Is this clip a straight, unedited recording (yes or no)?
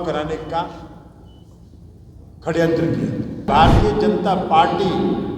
no